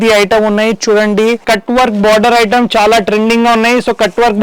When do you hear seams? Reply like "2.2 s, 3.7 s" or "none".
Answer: 1.4 s

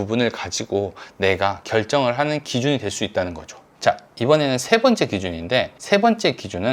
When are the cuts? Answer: 5.8 s

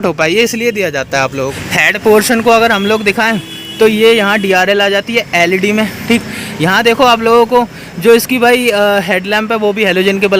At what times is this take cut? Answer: none

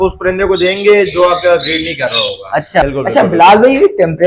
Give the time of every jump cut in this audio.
2.8 s

